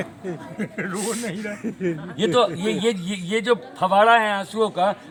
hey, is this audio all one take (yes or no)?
yes